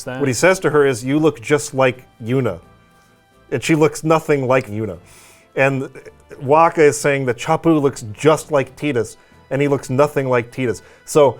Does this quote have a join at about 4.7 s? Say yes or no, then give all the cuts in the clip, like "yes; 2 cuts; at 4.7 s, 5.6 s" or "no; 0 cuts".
yes; 1 cut; at 4.7 s